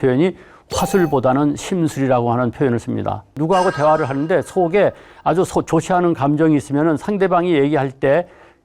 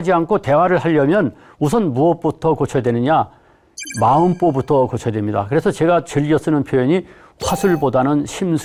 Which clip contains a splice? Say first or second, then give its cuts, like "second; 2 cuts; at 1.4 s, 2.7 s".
first; 1 cut; at 3.4 s